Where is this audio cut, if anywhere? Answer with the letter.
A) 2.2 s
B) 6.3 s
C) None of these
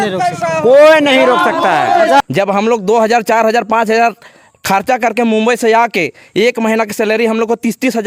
A